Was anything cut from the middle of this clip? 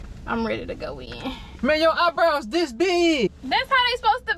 yes; 2 cuts; at 1.4 s, 3.3 s

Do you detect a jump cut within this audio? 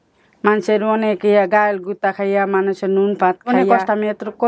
yes; 1 cut; at 3.6 s

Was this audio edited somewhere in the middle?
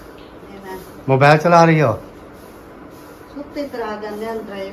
no; 0 cuts

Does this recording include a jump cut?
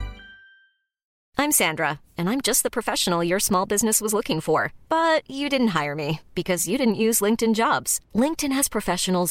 yes; 1 cut; at 1.2 s

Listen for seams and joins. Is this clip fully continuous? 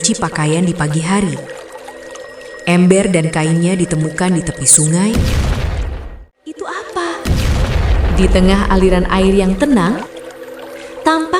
no; 1 cut; at 6.0 s

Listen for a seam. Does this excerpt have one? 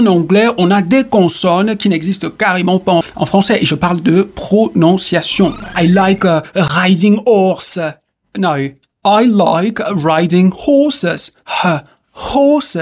yes; 2 cuts; at 3.0 s, 5.6 s

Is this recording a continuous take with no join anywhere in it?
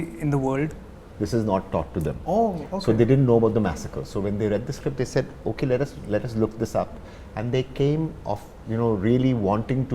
no; 1 cut; at 1.0 s

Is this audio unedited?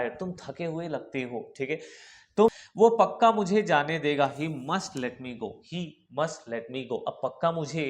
no; 1 cut; at 2.5 s

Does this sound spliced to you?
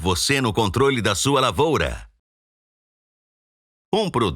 no; 0 cuts

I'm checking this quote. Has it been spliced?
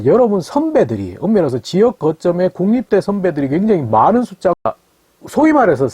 yes; 1 cut; at 4.6 s

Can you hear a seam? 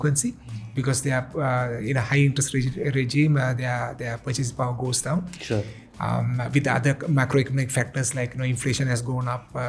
no; 0 cuts

